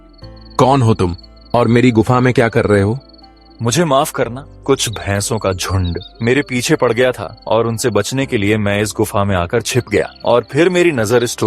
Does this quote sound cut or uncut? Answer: cut